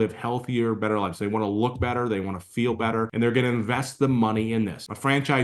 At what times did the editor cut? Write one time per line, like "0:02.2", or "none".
0:03.1